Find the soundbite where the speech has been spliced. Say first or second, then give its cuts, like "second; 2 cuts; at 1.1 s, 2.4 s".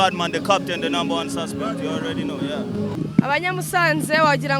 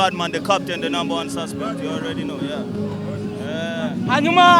first; 1 cut; at 2.9 s